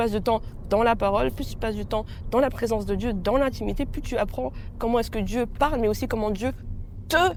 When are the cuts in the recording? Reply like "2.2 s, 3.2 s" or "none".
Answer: none